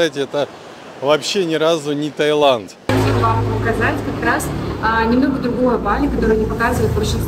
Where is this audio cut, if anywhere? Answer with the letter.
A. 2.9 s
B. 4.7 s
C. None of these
A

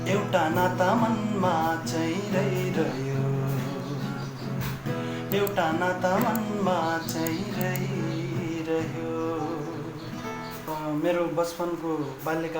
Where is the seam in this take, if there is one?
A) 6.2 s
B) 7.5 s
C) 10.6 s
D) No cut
C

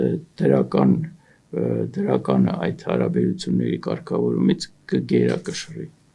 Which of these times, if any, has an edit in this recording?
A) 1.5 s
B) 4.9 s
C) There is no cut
C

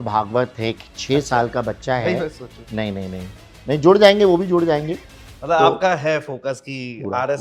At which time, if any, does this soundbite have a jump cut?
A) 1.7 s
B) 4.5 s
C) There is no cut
C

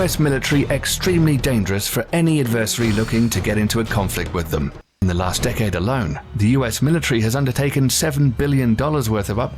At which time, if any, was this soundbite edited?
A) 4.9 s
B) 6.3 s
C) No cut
A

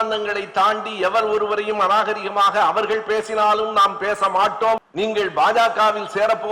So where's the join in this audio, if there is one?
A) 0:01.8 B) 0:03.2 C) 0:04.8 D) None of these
C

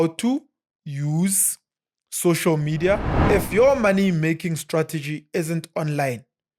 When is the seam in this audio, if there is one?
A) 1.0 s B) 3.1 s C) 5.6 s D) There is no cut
B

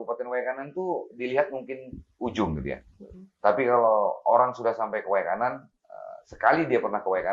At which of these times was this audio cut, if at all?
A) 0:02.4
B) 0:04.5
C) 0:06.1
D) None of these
D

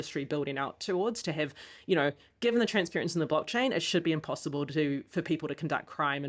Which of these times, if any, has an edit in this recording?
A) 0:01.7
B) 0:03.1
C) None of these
C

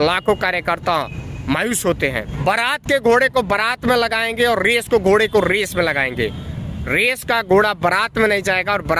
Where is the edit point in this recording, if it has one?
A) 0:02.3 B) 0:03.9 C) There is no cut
A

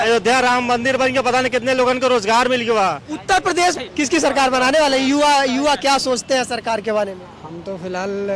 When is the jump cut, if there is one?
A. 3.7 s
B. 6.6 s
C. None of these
A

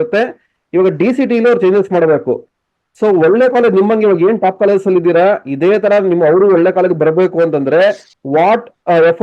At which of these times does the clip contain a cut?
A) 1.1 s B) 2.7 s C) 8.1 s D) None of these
C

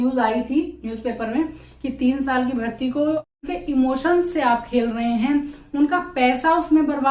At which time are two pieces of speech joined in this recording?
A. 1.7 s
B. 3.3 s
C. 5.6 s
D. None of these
B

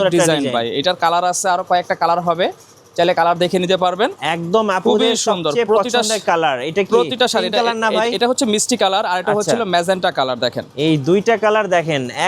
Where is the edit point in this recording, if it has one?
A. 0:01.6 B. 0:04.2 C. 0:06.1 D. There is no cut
B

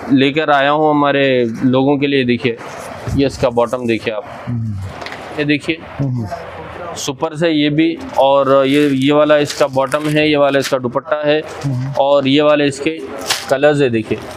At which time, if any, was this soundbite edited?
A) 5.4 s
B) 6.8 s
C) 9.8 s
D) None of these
A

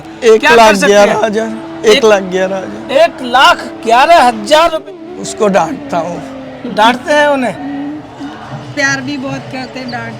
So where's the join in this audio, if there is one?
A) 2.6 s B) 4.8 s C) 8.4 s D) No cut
B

